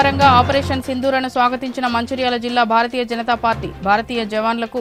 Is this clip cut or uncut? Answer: uncut